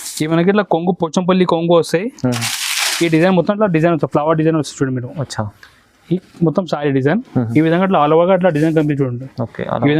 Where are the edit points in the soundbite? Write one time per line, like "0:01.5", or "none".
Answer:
none